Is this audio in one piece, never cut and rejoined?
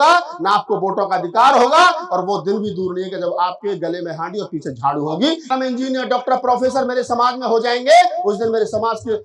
no; 1 cut; at 5.5 s

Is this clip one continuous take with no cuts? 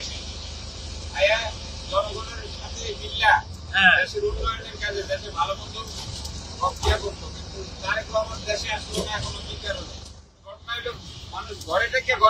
no; 1 cut; at 10.2 s

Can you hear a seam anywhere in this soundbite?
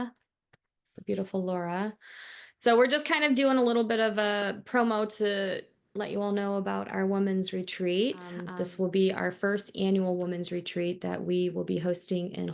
yes; 1 cut; at 8.4 s

